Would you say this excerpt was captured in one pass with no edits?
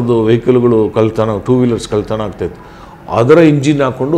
yes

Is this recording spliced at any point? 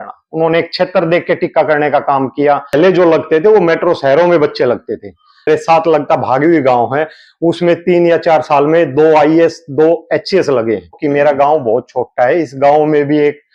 yes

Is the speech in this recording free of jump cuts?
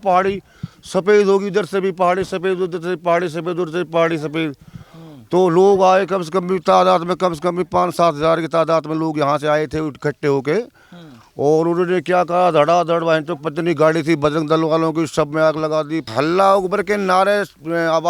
no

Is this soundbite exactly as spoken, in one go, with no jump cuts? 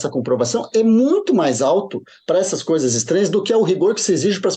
yes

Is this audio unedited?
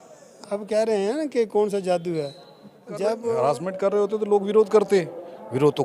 no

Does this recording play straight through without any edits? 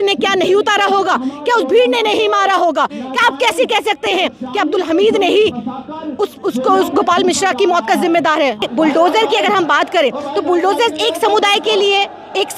no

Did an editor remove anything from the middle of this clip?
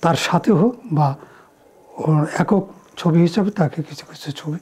no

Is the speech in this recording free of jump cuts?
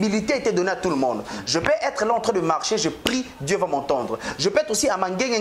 yes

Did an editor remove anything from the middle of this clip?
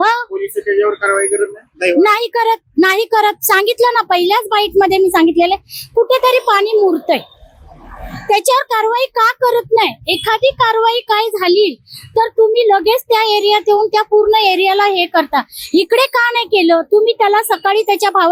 no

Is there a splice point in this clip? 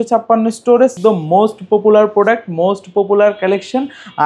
yes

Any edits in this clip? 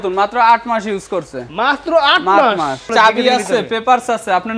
yes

